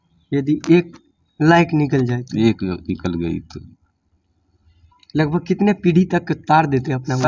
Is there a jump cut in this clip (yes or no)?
no